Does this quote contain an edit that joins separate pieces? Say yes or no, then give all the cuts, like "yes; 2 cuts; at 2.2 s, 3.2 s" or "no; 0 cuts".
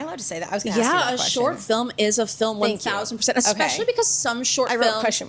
no; 0 cuts